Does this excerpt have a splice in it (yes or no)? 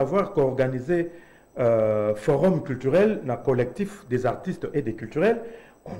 no